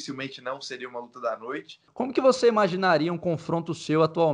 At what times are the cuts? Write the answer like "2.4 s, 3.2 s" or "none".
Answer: 1.8 s